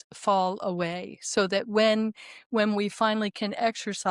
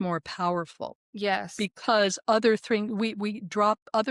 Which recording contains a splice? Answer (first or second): second